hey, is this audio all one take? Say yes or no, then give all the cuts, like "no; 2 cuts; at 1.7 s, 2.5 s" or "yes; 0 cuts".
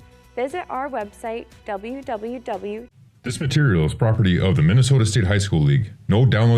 no; 1 cut; at 2.9 s